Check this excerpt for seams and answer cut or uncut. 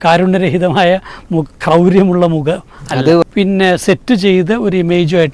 cut